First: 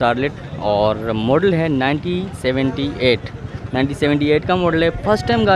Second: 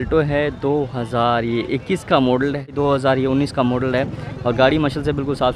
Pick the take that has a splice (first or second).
second